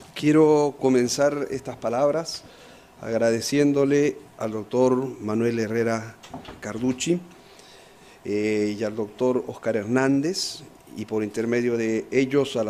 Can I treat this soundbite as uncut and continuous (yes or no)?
yes